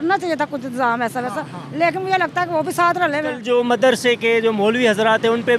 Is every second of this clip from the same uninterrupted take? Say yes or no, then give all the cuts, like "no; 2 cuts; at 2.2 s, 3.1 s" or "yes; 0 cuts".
no; 1 cut; at 3.4 s